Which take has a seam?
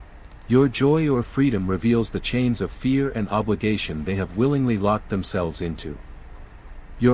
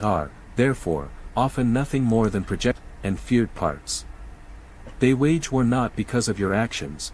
second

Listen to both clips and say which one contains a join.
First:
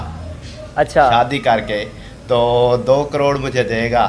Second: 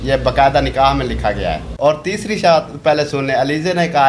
second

